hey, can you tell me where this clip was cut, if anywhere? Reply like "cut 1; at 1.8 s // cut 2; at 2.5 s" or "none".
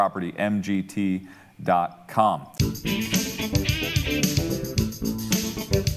cut 1; at 2.5 s